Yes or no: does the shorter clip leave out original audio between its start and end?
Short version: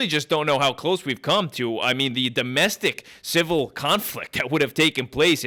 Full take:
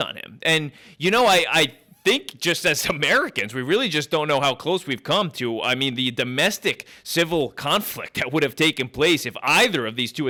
no